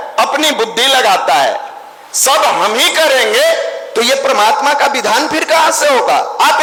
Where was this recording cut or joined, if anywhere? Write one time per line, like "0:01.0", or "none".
none